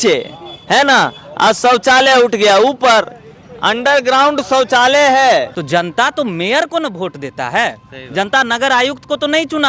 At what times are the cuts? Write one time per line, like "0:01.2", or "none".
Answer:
0:05.6